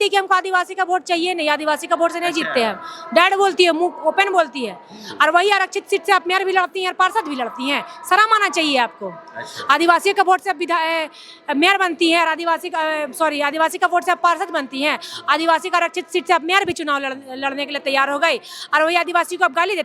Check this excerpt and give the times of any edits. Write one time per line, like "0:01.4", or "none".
none